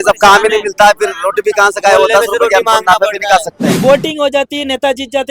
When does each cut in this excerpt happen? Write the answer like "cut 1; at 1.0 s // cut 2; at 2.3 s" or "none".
cut 1; at 3.7 s

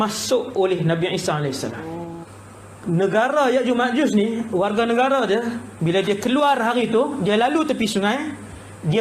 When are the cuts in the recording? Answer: cut 1; at 2.2 s

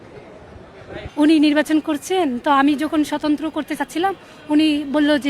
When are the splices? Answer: cut 1; at 1.0 s

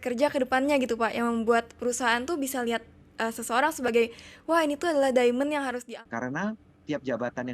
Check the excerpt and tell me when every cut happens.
cut 1; at 5.8 s

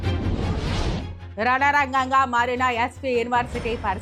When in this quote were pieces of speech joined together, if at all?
none

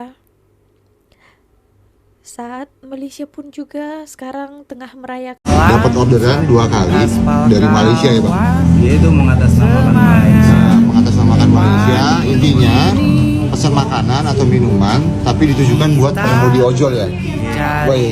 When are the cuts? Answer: cut 1; at 5.5 s

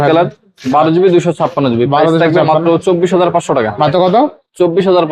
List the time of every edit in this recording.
none

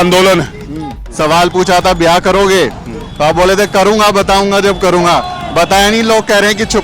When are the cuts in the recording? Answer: cut 1; at 1.0 s

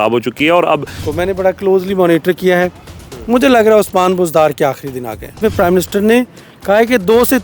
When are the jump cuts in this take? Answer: cut 1; at 1.0 s // cut 2; at 5.4 s

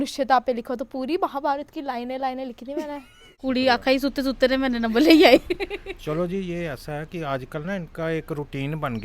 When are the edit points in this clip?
cut 1; at 3.4 s

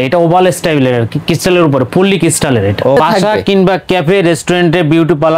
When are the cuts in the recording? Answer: cut 1; at 3.0 s

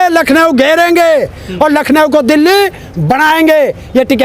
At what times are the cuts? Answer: none

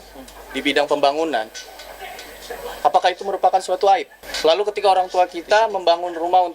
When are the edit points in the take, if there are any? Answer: cut 1; at 4.2 s

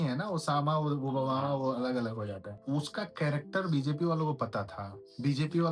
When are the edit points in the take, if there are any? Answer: cut 1; at 2.8 s

